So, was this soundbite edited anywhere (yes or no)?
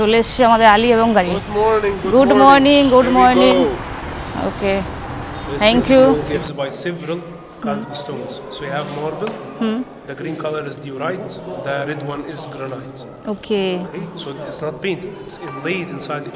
yes